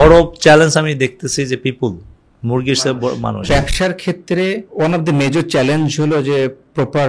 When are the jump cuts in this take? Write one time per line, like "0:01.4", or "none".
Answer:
0:03.5
0:04.7